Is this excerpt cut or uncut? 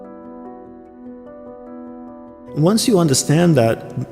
cut